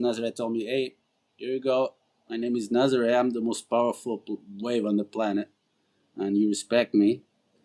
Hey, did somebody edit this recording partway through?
no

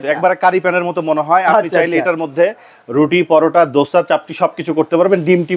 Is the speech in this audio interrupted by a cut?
no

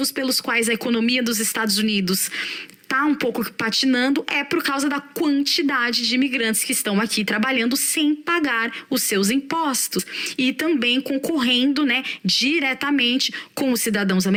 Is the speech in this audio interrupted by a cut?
no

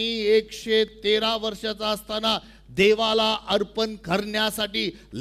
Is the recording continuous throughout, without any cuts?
yes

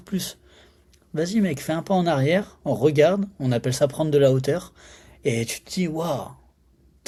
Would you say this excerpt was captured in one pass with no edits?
yes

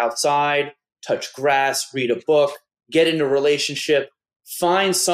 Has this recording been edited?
no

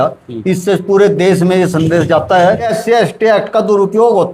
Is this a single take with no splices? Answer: no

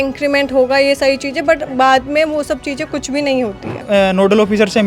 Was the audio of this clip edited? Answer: yes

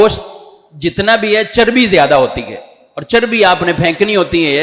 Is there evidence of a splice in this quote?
no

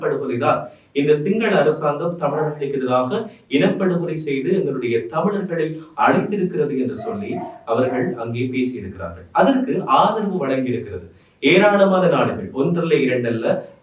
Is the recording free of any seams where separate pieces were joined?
yes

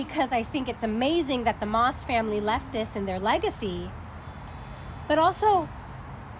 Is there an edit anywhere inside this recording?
no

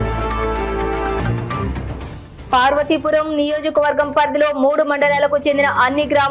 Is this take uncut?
no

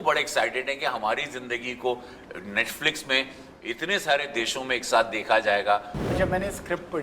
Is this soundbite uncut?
no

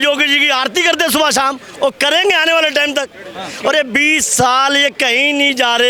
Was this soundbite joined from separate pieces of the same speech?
no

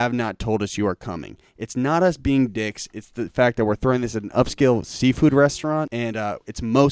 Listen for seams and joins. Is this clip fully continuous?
no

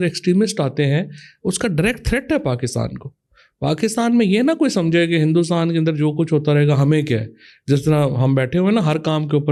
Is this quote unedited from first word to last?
yes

